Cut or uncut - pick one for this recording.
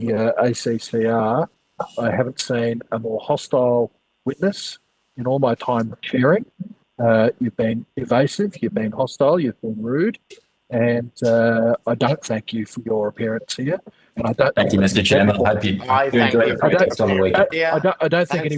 uncut